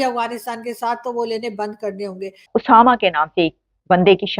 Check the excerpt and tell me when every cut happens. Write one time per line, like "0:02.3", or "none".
0:02.5